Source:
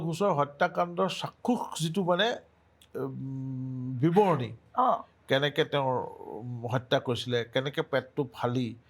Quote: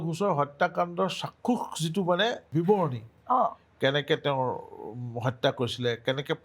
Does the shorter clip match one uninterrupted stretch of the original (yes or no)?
no